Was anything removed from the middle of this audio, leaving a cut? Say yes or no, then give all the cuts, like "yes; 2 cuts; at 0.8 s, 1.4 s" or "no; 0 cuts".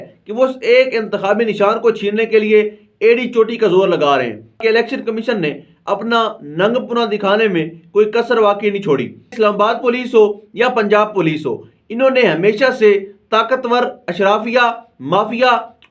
yes; 2 cuts; at 4.6 s, 9.3 s